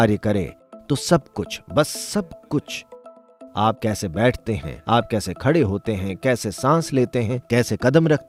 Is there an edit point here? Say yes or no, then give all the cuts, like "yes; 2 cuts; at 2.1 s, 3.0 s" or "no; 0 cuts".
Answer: no; 0 cuts